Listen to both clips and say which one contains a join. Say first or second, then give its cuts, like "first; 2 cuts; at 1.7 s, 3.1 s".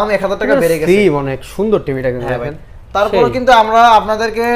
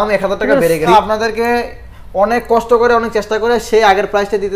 second; 1 cut; at 0.9 s